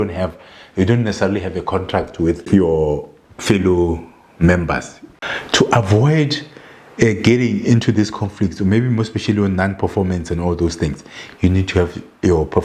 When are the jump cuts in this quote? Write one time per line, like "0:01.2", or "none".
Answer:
0:02.5
0:05.1